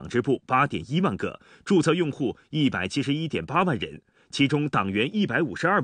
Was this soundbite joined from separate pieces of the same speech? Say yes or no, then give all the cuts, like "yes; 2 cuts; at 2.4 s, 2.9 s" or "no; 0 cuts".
yes; 1 cut; at 1.5 s